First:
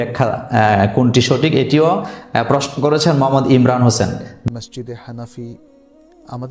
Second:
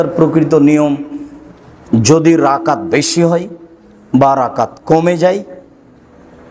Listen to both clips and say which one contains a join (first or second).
first